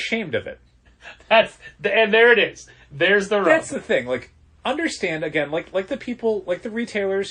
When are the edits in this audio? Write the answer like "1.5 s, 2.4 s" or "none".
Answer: none